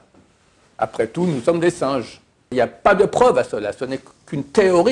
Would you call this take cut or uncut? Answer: cut